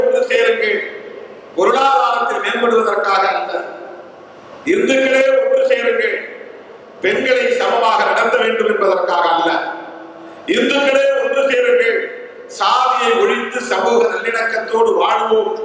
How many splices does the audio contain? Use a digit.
0